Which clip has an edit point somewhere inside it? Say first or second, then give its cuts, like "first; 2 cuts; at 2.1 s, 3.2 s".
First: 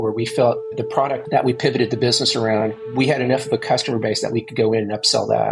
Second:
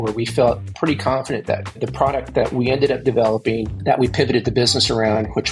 first; 2 cuts; at 0.9 s, 2.7 s